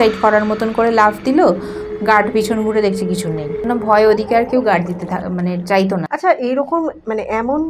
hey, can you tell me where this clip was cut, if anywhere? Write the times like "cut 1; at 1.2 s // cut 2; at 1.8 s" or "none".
cut 1; at 3.6 s // cut 2; at 6.1 s